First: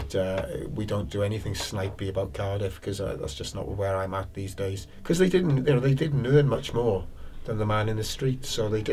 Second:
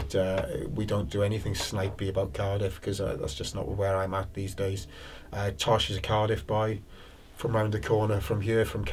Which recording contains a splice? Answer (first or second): first